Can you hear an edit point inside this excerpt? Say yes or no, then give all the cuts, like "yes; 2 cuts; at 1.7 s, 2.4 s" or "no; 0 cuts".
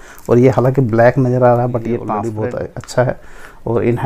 yes; 1 cut; at 2.2 s